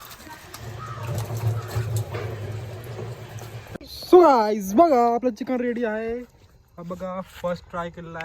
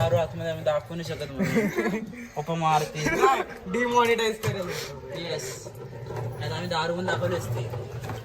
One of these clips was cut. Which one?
first; 1 cut; at 3.8 s

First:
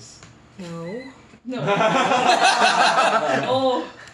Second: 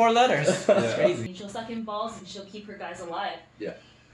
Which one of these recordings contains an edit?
second; 1 cut; at 1.3 s

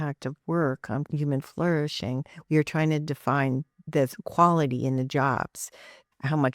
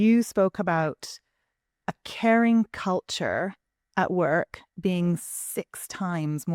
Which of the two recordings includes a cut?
first; 1 cut; at 1.1 s

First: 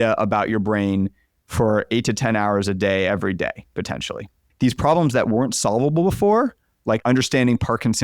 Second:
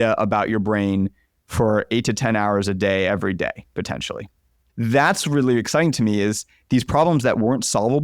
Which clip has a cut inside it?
first; 2 cuts; at 4.4 s, 7.0 s

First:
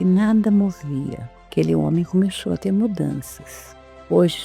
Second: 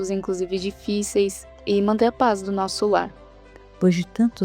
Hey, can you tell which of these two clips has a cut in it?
second; 2 cuts; at 1.5 s, 3.5 s

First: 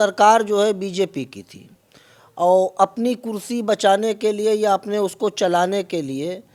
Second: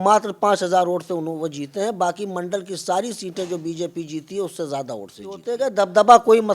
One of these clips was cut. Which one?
second; 1 cut; at 5.5 s

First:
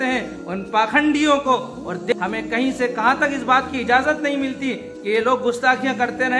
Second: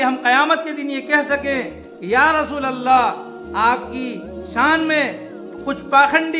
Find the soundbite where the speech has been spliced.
first; 1 cut; at 2.1 s

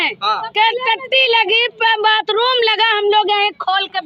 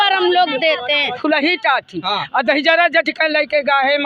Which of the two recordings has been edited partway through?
second; 1 cut; at 1.2 s

